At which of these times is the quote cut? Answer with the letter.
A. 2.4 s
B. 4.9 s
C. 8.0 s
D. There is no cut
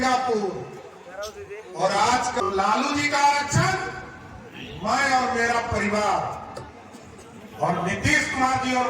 A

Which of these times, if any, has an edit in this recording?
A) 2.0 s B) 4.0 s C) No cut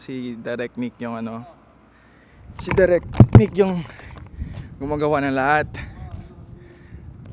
C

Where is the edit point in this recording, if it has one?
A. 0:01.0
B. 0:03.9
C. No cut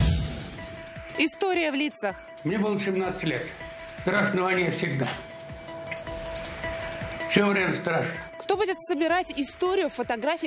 A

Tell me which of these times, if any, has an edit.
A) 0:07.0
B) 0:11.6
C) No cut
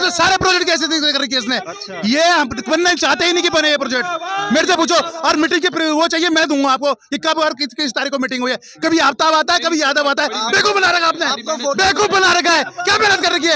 C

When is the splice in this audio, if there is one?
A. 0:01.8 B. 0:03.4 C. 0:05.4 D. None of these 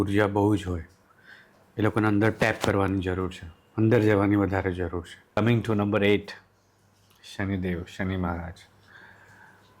C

